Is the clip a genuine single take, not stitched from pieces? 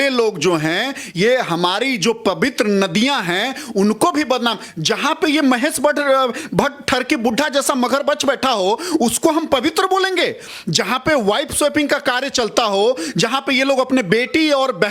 yes; 0 cuts

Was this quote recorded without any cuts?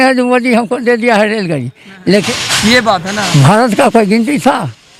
no; 1 cut; at 2.1 s

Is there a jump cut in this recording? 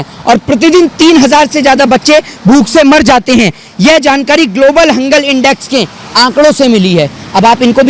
no; 0 cuts

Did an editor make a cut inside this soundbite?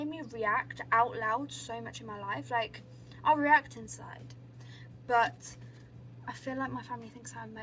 no; 0 cuts

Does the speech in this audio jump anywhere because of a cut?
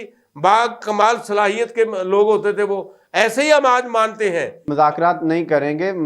yes; 1 cut; at 4.5 s

